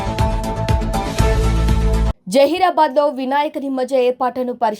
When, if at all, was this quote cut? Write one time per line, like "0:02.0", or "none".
0:02.1